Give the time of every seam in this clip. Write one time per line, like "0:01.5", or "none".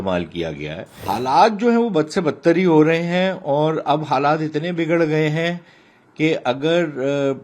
0:01.1